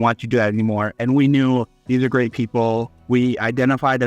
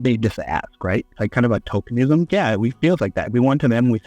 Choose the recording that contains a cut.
second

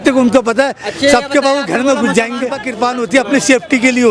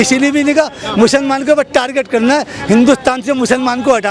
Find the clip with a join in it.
first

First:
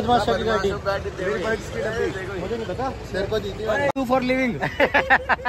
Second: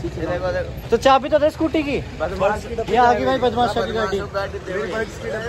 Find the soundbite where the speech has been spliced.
first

